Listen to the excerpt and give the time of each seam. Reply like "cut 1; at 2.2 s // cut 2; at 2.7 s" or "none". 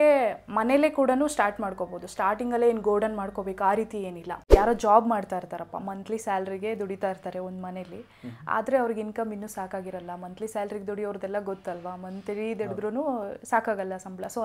cut 1; at 4.2 s